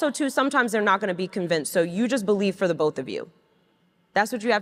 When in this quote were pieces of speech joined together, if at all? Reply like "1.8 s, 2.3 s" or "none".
none